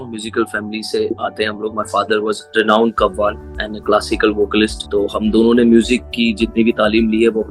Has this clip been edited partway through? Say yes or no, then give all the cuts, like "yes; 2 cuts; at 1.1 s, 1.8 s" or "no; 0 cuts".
yes; 3 cuts; at 1.1 s, 2.4 s, 4.8 s